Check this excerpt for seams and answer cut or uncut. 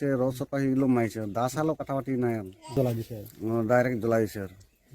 cut